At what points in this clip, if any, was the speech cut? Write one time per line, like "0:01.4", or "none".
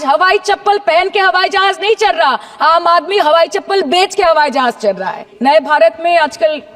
0:05.2